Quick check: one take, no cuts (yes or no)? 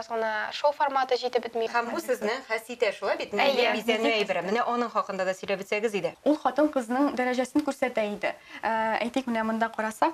no